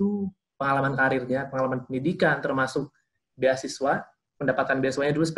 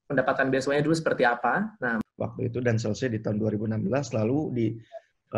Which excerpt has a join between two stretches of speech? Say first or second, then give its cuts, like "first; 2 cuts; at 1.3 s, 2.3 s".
second; 1 cut; at 2.0 s